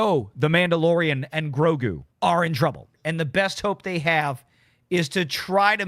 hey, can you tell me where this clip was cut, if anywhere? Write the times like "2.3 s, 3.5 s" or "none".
2.1 s, 3.0 s